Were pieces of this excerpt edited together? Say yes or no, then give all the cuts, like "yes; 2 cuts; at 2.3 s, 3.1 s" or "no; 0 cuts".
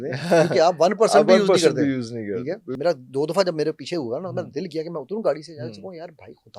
yes; 1 cut; at 2.7 s